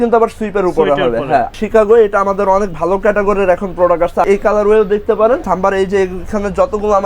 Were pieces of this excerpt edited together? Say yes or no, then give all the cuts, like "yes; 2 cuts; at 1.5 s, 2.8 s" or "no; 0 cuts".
yes; 3 cuts; at 1.5 s, 4.3 s, 5.4 s